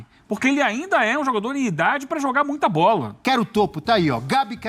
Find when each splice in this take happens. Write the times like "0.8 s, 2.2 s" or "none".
3.2 s